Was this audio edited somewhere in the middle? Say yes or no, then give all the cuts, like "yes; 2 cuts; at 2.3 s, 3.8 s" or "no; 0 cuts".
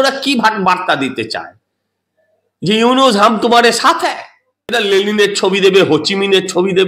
yes; 1 cut; at 4.7 s